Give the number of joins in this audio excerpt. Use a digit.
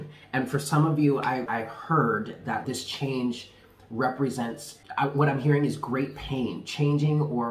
3